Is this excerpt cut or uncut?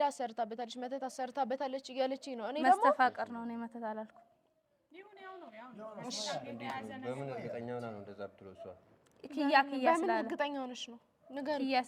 uncut